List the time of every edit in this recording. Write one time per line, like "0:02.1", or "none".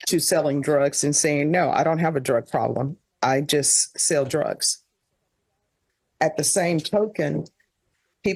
none